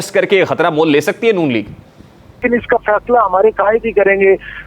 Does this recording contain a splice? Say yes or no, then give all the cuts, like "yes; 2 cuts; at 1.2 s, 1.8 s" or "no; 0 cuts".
yes; 1 cut; at 2.4 s